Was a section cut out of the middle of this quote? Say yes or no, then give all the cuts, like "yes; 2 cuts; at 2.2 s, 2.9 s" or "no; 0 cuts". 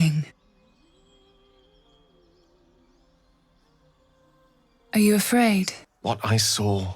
yes; 1 cut; at 5.9 s